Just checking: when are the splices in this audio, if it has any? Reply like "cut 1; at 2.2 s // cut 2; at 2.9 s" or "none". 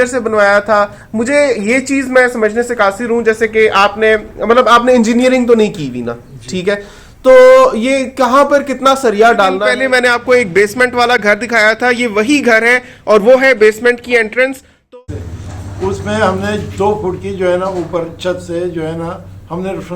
cut 1; at 9.6 s // cut 2; at 14.9 s